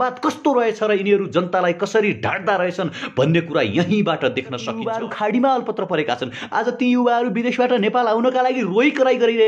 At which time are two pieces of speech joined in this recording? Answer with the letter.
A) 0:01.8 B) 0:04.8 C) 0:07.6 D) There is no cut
B